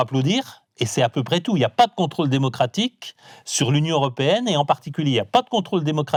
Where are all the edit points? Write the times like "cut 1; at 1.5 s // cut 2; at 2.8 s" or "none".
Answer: none